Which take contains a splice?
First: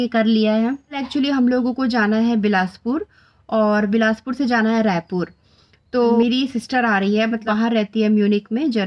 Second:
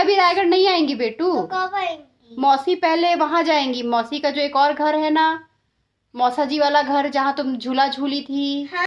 first; 3 cuts; at 1.0 s, 6.2 s, 7.5 s

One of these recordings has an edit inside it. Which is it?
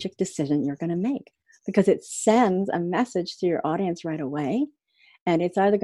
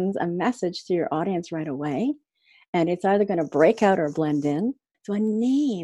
second; 1 cut; at 4.9 s

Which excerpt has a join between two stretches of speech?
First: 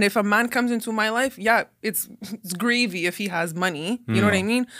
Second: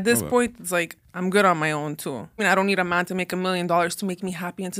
second; 2 cuts; at 1.0 s, 2.4 s

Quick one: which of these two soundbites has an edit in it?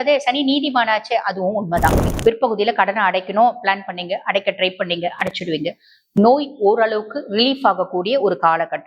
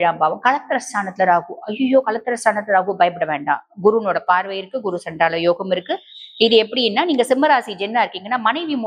first; 1 cut; at 2.1 s

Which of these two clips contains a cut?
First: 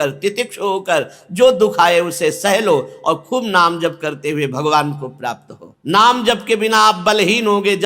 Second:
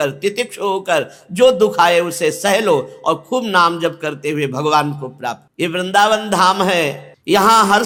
first; 1 cut; at 5.4 s

